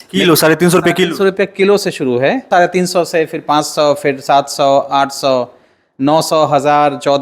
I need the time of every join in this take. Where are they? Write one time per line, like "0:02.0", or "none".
0:02.4